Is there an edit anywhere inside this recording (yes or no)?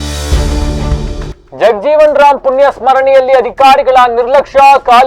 yes